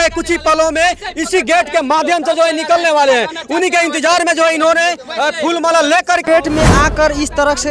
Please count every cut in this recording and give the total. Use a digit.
1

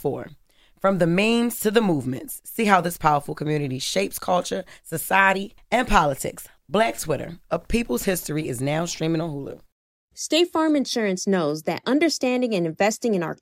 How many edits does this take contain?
1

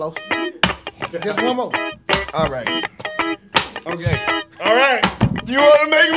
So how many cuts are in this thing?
0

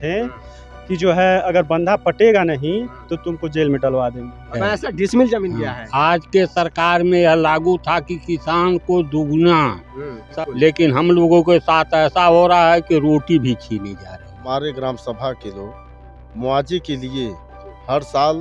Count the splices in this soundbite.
3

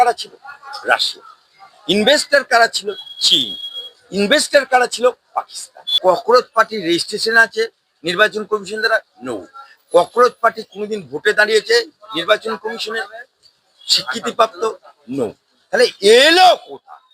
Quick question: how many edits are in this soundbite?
1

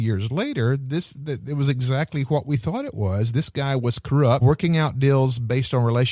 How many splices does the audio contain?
1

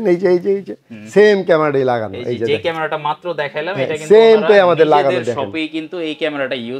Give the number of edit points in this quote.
0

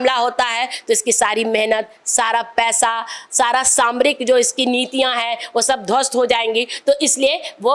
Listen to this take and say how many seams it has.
0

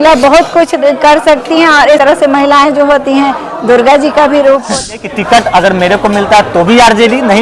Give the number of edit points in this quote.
2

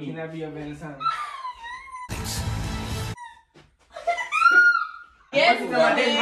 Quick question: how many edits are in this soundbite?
1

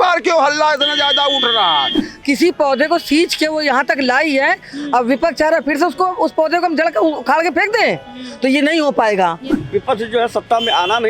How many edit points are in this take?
2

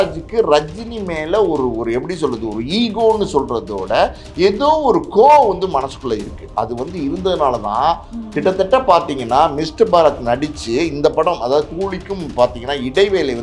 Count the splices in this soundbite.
0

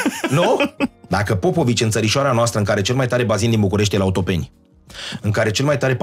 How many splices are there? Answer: 1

